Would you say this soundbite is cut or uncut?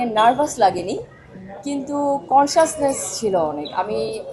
uncut